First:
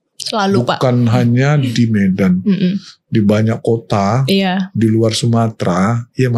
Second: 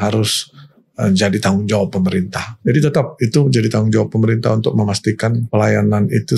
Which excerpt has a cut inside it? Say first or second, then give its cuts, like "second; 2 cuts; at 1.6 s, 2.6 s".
second; 2 cuts; at 2.4 s, 5.5 s